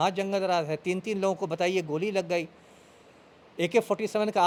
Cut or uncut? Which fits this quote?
uncut